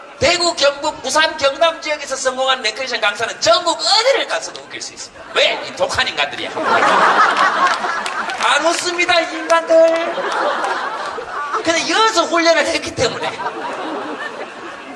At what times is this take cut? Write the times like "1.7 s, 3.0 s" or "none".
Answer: 3.0 s